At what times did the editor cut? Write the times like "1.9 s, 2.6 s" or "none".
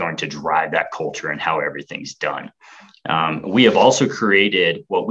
none